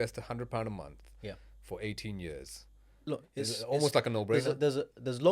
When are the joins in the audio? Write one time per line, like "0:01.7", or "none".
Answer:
0:02.9